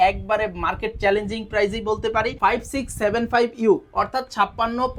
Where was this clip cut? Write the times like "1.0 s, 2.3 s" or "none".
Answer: 2.3 s